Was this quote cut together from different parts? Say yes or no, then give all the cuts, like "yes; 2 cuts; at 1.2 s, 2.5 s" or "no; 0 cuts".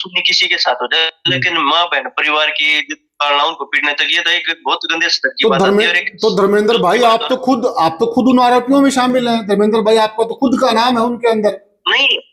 no; 0 cuts